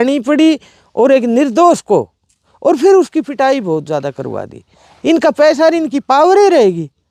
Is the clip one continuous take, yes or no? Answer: yes